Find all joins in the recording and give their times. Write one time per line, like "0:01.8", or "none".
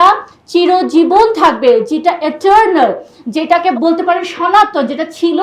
0:03.7